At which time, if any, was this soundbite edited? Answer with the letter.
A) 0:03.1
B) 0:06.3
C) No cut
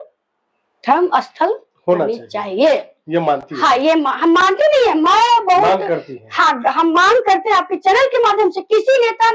C